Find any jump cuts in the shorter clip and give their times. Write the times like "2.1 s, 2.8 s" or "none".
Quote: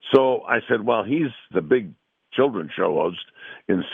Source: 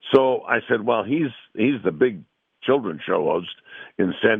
1.5 s